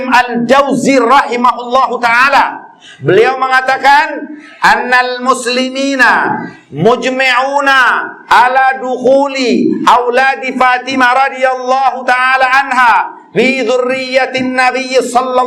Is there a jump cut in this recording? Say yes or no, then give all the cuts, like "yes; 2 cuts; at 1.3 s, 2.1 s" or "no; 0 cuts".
no; 0 cuts